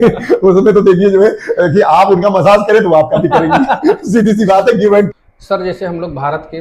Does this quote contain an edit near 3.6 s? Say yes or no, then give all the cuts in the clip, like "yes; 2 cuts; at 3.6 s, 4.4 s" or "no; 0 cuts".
no; 1 cut; at 5.1 s